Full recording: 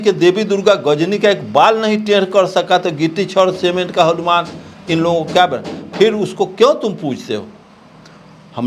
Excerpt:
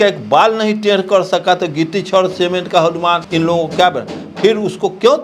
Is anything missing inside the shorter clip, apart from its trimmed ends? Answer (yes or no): yes